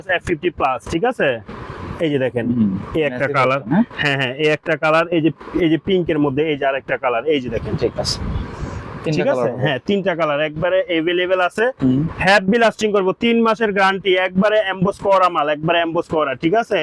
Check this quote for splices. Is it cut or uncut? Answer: uncut